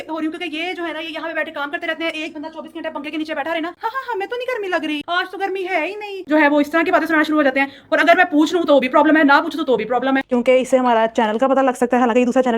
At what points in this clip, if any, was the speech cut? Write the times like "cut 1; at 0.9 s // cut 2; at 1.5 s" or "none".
cut 1; at 3.8 s // cut 2; at 6.3 s // cut 3; at 10.2 s